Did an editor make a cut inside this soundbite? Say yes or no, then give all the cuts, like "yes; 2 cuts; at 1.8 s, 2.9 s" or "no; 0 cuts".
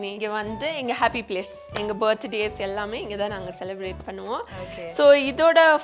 no; 0 cuts